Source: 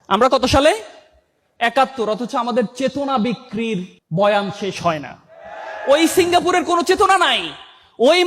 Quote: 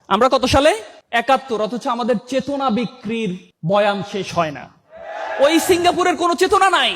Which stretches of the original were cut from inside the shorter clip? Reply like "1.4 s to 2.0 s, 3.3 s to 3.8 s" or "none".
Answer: 0.9 s to 1.4 s